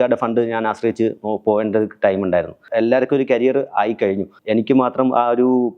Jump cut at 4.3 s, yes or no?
yes